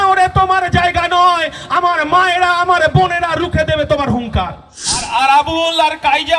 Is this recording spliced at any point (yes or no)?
yes